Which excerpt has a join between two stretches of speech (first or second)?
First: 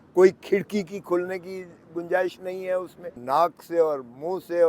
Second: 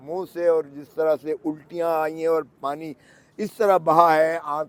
first